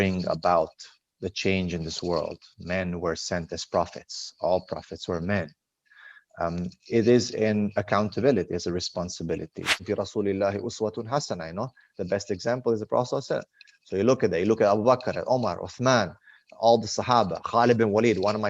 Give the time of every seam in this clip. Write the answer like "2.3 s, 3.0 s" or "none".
9.8 s